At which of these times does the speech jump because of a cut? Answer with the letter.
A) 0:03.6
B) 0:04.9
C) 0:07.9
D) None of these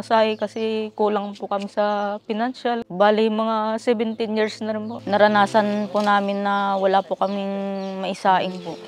B